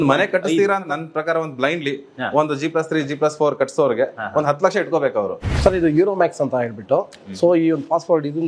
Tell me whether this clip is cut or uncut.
cut